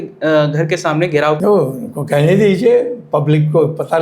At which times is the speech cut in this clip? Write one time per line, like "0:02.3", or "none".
0:01.4